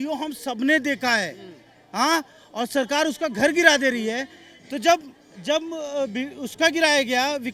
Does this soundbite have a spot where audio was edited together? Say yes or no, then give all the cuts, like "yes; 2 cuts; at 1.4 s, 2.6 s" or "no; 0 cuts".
no; 0 cuts